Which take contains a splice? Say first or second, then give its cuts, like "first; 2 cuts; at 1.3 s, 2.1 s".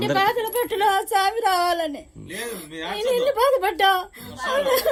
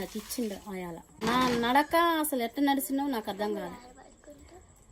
second; 1 cut; at 1.2 s